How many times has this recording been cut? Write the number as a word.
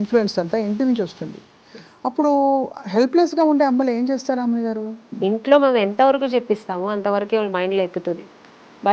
one